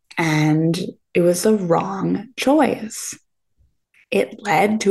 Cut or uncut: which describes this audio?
uncut